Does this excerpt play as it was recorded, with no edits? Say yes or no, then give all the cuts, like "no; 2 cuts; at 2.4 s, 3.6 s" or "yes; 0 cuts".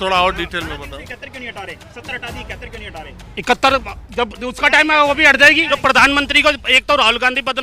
no; 1 cut; at 5.6 s